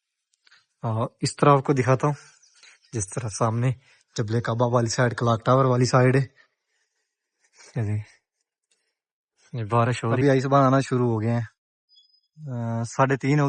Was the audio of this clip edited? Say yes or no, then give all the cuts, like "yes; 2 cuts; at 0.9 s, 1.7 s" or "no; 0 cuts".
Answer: yes; 1 cut; at 10.2 s